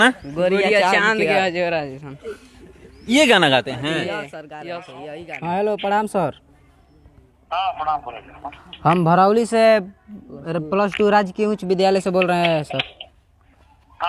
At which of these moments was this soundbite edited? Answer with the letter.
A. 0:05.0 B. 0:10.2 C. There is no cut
A